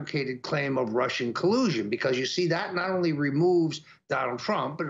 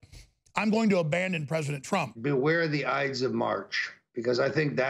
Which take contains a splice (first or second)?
second